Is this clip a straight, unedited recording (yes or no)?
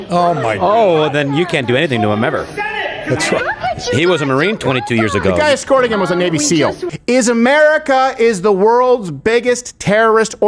no